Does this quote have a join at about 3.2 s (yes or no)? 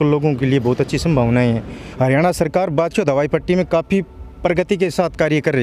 no